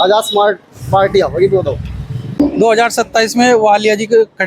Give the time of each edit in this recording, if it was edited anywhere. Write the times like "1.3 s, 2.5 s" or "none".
2.4 s